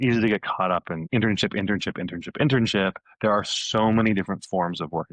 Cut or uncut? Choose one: cut